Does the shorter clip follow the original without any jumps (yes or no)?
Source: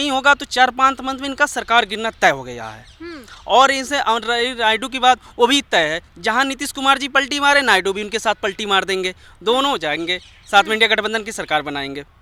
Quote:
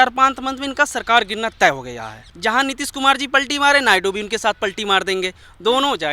no